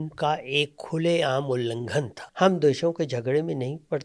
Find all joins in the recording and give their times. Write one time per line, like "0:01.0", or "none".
0:02.2